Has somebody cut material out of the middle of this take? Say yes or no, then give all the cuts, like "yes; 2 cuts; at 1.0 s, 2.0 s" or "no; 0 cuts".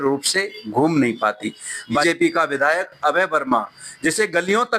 yes; 1 cut; at 2.0 s